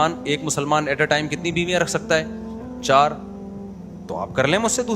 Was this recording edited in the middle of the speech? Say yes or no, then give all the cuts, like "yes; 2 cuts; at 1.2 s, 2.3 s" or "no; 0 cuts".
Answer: no; 0 cuts